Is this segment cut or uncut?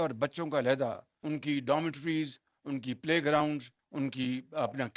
cut